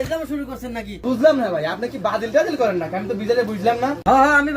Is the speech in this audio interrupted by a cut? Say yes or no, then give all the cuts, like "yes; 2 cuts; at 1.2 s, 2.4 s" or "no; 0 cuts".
yes; 1 cut; at 1.0 s